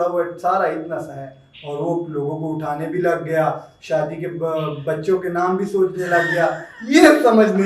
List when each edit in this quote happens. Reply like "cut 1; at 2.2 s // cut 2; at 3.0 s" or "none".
none